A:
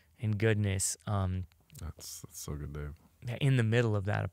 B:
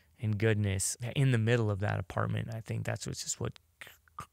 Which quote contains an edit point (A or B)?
B